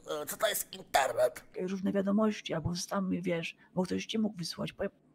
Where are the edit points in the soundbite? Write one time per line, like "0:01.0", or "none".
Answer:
0:01.5